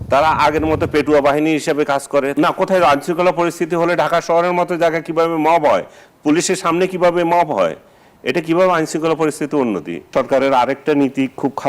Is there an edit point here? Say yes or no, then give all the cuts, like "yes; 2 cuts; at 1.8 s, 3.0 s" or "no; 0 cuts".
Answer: yes; 2 cuts; at 2.3 s, 10.1 s